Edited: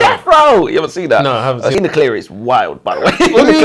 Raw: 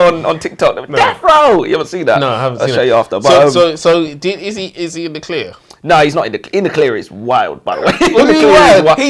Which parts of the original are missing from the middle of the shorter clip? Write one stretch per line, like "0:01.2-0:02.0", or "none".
0:02.8-0:06.6